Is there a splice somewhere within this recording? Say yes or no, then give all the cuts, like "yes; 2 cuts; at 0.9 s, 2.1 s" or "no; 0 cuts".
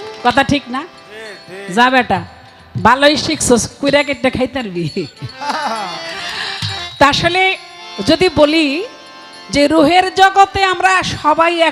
no; 0 cuts